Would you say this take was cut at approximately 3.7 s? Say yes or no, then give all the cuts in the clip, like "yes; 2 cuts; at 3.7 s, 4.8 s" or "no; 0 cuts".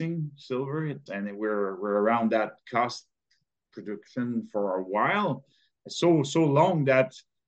no; 1 cut; at 1.0 s